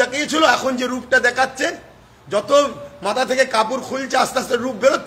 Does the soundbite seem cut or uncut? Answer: uncut